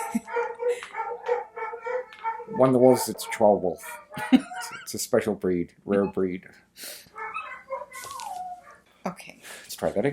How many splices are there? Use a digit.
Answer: 2